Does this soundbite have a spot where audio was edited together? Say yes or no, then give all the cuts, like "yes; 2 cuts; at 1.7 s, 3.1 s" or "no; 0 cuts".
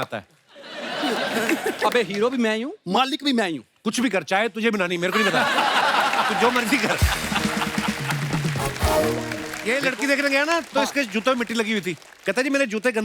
yes; 1 cut; at 9.5 s